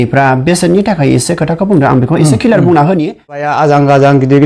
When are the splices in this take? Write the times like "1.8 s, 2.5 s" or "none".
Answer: 3.5 s